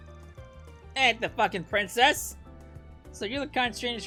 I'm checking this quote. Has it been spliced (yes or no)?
no